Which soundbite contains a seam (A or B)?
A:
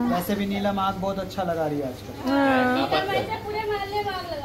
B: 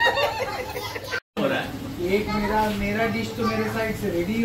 B